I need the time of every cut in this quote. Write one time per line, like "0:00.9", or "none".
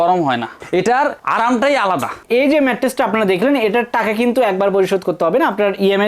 0:02.2